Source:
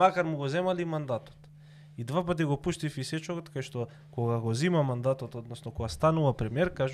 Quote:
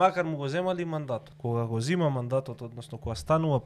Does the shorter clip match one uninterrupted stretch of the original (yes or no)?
no